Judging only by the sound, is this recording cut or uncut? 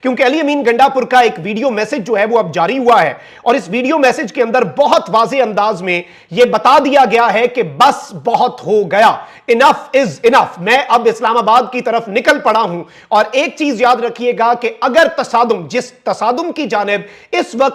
uncut